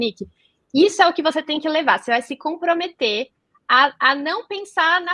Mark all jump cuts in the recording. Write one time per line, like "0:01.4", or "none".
none